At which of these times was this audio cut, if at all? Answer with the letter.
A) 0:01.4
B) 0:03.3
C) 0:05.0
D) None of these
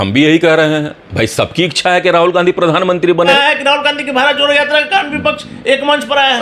B